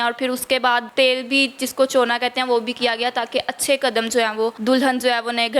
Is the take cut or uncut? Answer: cut